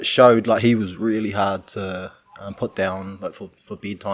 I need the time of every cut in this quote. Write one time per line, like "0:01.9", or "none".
none